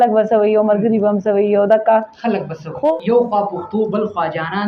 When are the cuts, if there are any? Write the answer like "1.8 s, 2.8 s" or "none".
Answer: 2.9 s